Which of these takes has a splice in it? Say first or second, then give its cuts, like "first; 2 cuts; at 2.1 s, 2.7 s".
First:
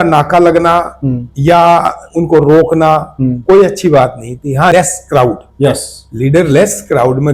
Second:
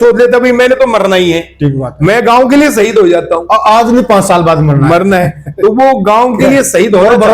first; 1 cut; at 4.7 s